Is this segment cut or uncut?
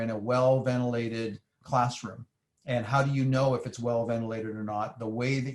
cut